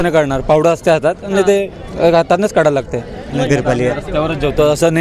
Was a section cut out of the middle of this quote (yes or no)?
yes